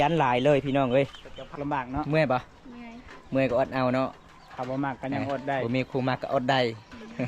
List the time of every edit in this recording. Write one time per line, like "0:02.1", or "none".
0:01.5

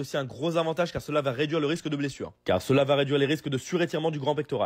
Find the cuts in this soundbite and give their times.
0:02.3

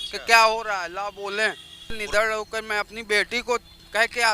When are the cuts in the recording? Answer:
0:02.0

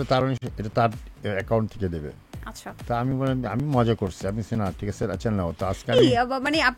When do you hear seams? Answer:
none

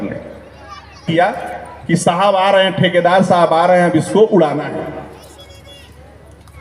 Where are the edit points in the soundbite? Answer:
0:01.1

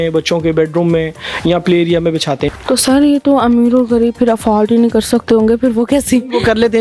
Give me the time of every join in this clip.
0:02.5

